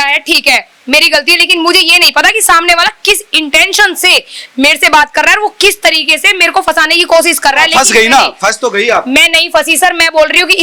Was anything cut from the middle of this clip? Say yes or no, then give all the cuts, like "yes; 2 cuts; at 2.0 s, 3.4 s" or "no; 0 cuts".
no; 0 cuts